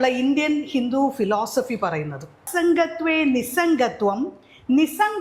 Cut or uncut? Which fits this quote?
cut